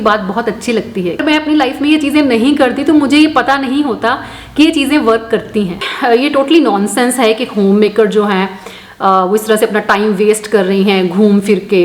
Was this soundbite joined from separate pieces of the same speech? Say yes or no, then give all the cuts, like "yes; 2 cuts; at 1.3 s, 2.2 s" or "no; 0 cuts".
yes; 2 cuts; at 1.2 s, 5.8 s